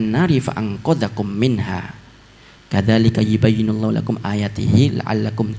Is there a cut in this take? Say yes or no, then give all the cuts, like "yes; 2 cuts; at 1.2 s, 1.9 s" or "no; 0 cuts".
no; 0 cuts